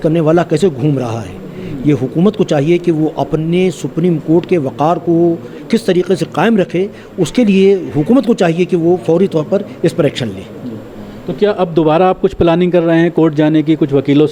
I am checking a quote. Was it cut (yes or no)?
no